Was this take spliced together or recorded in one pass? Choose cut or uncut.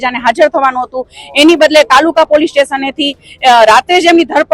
uncut